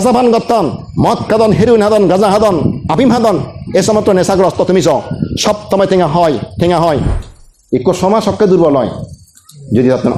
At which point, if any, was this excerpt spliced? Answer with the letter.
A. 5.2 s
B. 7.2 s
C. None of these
B